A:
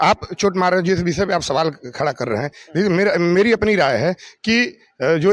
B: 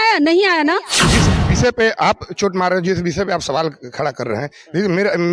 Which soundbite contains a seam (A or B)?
B